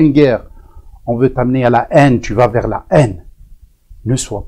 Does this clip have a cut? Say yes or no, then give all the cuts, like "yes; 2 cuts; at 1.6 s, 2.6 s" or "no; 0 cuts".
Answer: no; 0 cuts